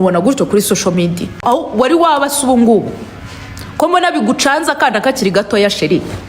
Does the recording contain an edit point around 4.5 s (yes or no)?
no